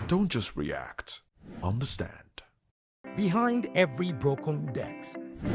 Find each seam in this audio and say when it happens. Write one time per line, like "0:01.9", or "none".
0:02.8